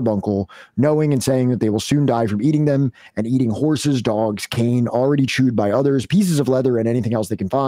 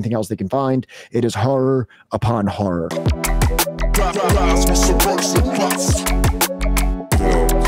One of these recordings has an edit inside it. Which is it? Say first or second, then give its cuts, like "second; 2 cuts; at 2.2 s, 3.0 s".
second; 1 cut; at 3.0 s